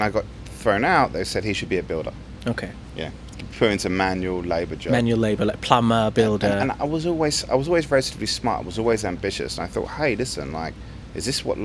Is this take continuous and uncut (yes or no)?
yes